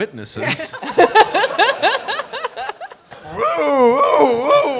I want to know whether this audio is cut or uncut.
cut